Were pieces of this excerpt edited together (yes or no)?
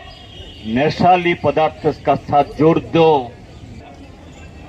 yes